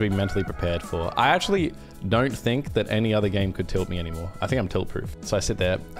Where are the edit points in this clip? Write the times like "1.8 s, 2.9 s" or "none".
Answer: 5.0 s